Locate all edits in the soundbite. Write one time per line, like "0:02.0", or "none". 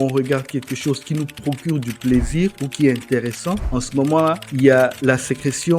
none